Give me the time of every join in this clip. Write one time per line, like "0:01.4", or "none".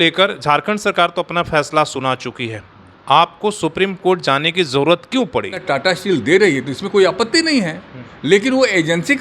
0:05.6